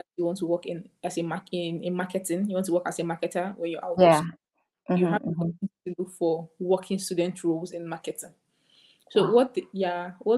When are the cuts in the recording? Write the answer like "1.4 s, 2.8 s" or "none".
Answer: none